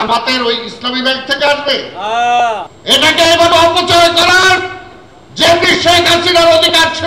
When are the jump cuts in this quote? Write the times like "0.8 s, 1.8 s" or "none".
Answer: 2.7 s

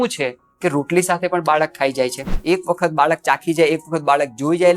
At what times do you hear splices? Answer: 2.3 s

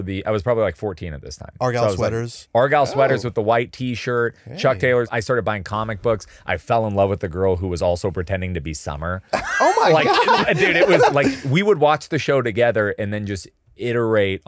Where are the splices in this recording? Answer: 2.3 s, 5.1 s, 11.1 s

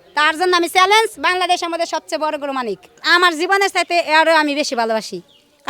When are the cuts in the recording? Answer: 3.0 s

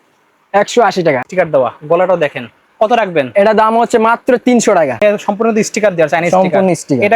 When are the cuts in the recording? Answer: 1.2 s, 5.0 s

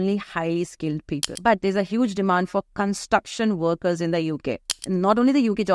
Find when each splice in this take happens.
1.3 s, 4.8 s

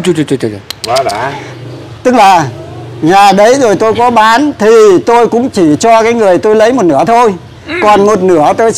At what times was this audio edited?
1.3 s

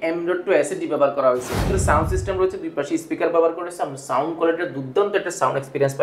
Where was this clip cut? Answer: 1.6 s

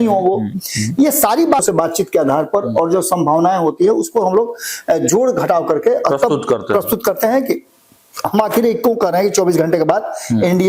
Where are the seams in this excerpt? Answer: 1.6 s

